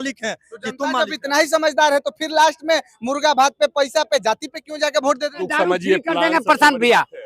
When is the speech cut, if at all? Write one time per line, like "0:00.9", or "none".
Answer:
0:05.5